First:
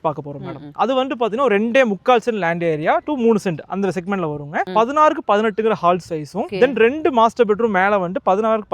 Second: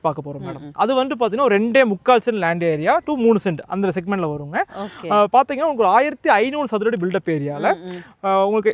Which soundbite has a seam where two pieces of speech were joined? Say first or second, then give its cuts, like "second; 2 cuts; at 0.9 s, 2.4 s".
first; 2 cuts; at 4.7 s, 6.5 s